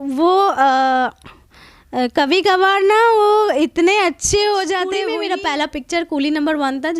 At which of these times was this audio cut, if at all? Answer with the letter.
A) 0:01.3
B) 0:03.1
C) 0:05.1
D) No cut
C